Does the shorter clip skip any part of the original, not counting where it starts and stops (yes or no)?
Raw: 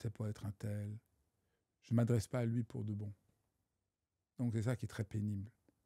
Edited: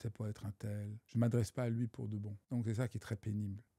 yes